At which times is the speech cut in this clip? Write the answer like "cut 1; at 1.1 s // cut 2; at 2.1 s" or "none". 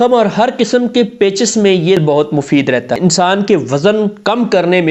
cut 1; at 2.0 s // cut 2; at 2.9 s